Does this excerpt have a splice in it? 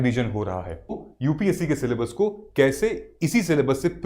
yes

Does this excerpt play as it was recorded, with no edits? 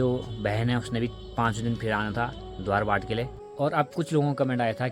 no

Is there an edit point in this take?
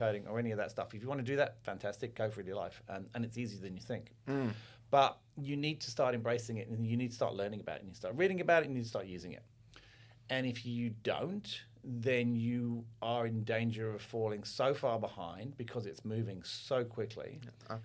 no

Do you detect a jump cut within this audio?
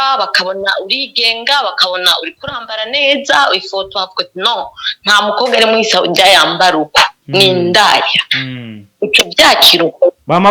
no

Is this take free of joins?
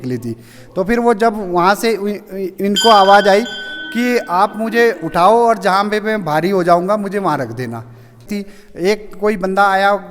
no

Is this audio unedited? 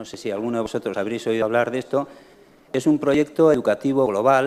yes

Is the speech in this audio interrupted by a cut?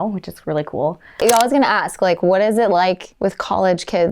yes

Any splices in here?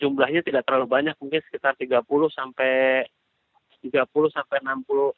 no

